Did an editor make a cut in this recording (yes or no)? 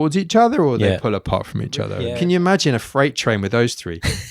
yes